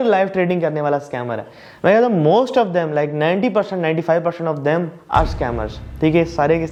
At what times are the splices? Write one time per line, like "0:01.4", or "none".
none